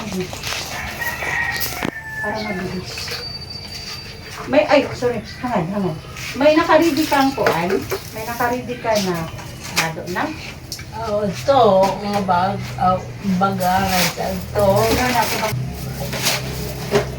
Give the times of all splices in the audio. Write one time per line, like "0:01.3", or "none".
0:15.6

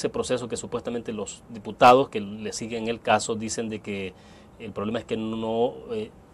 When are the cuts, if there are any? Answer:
none

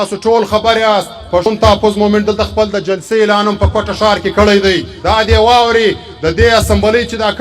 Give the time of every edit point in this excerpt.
0:01.5
0:04.9

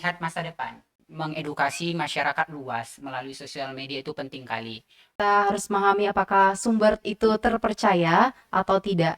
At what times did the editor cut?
0:01.0
0:05.2

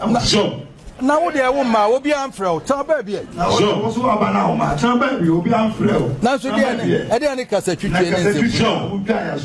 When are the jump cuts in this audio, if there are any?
none

